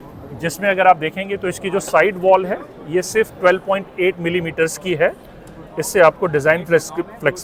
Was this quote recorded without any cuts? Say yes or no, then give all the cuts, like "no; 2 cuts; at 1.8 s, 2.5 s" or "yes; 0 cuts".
yes; 0 cuts